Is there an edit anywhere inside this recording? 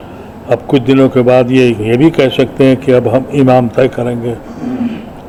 no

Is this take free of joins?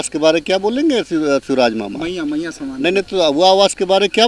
yes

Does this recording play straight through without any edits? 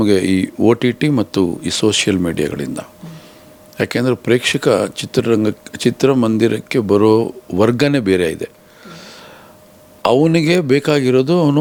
yes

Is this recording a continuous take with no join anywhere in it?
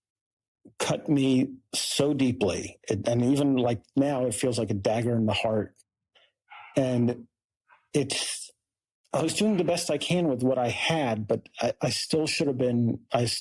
yes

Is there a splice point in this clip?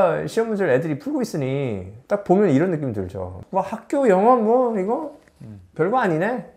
no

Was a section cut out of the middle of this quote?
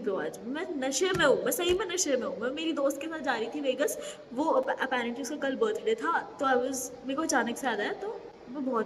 no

